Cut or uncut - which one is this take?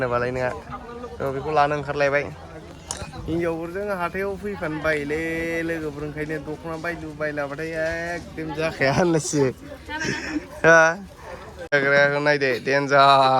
cut